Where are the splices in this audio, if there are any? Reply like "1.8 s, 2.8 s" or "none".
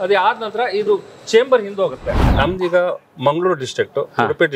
2.2 s